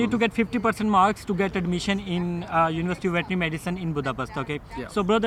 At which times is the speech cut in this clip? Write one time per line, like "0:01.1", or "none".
none